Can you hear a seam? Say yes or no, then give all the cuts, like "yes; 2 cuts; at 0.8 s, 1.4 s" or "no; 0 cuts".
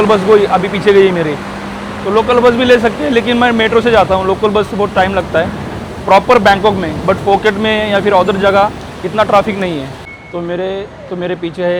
no; 0 cuts